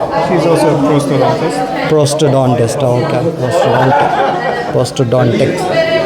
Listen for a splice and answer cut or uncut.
uncut